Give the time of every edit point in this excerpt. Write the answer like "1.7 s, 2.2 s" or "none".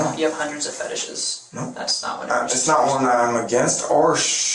none